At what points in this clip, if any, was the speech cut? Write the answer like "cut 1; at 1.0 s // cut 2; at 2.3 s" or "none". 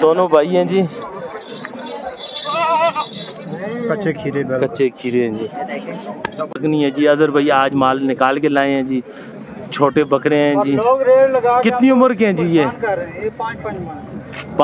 cut 1; at 6.6 s